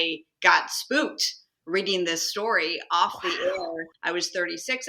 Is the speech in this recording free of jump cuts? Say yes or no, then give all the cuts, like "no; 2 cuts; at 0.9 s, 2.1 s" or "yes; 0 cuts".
no; 1 cut; at 3.9 s